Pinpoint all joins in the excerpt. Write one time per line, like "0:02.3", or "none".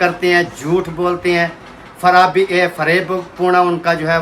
none